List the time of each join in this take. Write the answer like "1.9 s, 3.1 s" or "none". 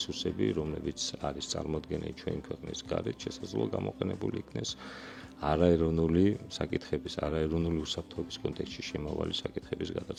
none